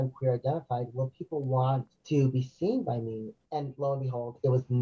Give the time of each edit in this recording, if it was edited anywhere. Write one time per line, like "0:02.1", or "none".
0:01.9
0:03.4